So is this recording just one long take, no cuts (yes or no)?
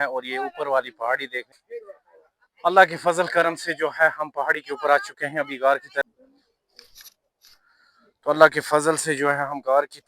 no